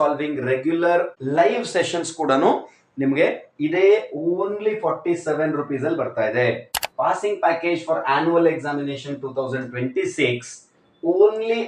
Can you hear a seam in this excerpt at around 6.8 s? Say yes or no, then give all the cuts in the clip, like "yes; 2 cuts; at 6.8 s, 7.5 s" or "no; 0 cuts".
yes; 2 cuts; at 1.2 s, 6.8 s